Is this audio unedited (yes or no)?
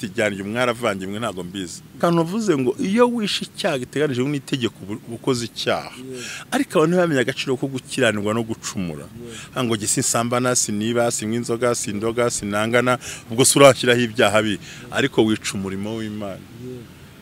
no